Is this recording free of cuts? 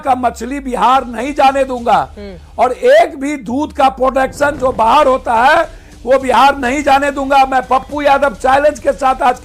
yes; 0 cuts

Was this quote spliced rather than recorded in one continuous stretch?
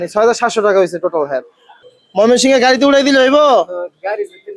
yes; 1 cut; at 1.8 s

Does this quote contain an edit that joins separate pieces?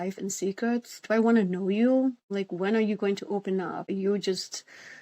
yes; 2 cuts; at 2.2 s, 3.8 s

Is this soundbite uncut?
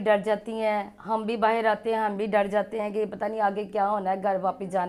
yes; 0 cuts

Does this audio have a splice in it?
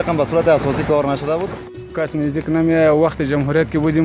yes; 1 cut; at 1.6 s

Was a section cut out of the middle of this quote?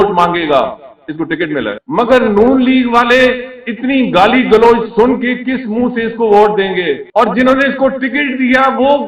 yes; 2 cuts; at 1.8 s, 7.0 s

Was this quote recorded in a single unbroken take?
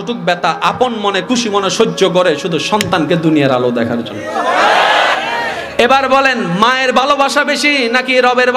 no; 1 cut; at 5.1 s

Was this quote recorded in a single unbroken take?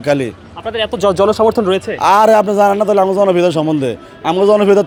yes; 0 cuts

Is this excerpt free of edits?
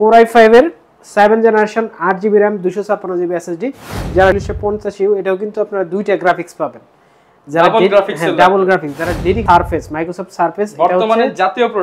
no; 2 cuts; at 4.4 s, 9.4 s

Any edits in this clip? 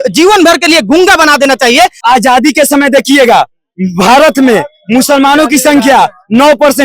yes; 1 cut; at 2.0 s

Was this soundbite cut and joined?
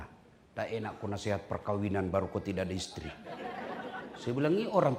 no; 0 cuts

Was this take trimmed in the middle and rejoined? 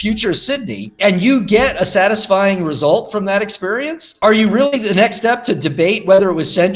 yes; 2 cuts; at 1.0 s, 4.0 s

